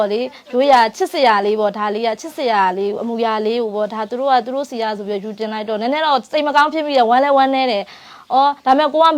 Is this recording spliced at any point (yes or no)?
no